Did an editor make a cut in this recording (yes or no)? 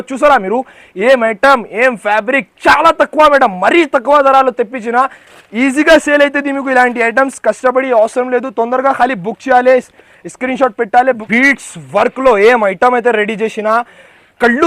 yes